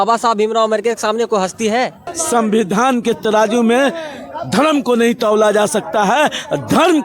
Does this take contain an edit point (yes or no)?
yes